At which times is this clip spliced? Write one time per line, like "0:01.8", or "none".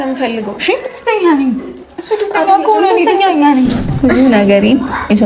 0:03.9